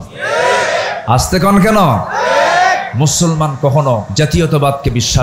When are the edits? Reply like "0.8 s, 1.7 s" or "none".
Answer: 4.1 s